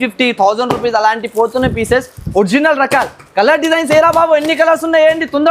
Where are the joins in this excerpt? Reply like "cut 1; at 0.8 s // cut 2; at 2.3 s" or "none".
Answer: none